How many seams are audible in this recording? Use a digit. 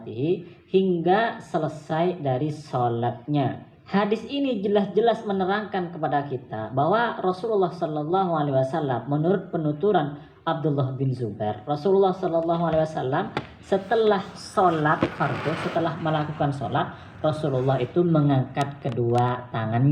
1